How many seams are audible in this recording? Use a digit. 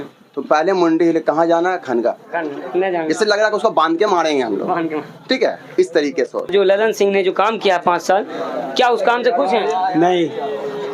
2